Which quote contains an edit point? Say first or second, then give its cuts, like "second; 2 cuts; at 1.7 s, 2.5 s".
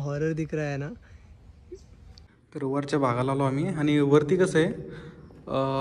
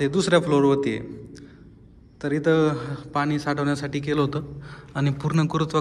first; 1 cut; at 2.3 s